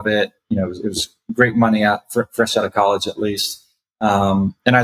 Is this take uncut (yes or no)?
yes